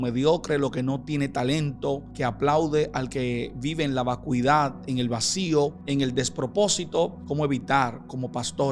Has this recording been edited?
yes; 3 cuts; at 2.1 s, 5.8 s, 7.2 s

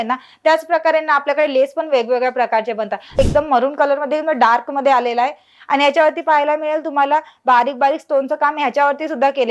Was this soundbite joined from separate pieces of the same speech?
yes; 1 cut; at 3.2 s

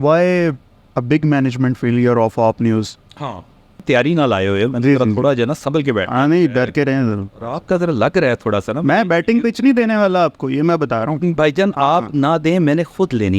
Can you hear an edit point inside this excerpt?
yes; 1 cut; at 3.8 s

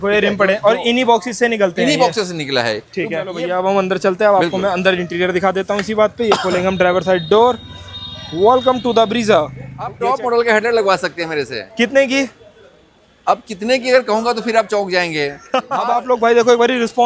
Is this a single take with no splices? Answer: no; 3 cuts; at 3.3 s, 9.8 s, 15.8 s

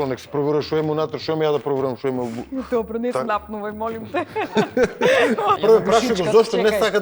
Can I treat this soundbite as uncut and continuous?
no; 1 cut; at 5.6 s

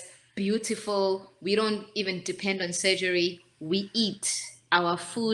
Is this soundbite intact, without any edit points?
yes; 0 cuts

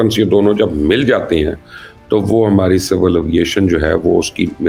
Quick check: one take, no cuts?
yes; 0 cuts

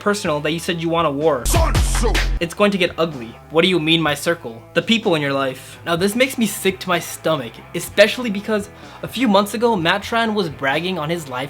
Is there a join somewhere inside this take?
no; 0 cuts

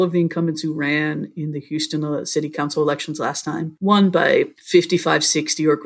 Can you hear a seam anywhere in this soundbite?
yes; 2 cuts; at 3.7 s, 4.6 s

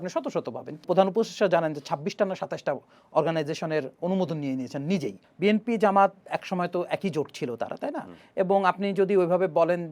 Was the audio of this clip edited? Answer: yes; 2 cuts; at 0.8 s, 5.2 s

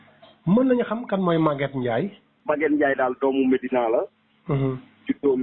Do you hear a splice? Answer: yes; 1 cut; at 2.3 s

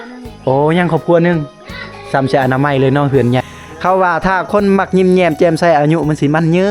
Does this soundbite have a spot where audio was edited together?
yes; 1 cut; at 3.4 s

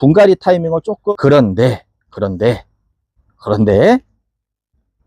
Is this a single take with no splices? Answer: no; 1 cut; at 1.0 s

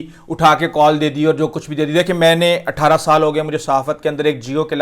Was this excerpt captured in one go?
yes; 0 cuts

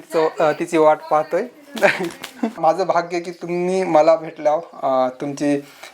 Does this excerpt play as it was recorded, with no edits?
no; 1 cut; at 2.6 s

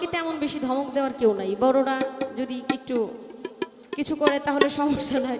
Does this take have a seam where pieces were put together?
no; 0 cuts

